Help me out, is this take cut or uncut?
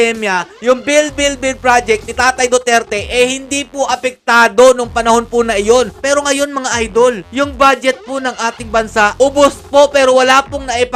cut